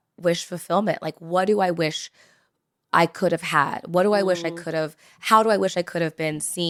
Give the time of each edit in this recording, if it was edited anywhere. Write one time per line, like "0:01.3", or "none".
none